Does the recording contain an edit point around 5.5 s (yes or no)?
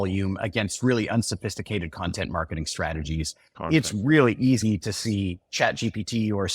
no